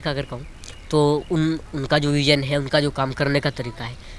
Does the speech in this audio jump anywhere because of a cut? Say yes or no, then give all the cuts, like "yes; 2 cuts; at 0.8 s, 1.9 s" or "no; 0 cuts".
no; 0 cuts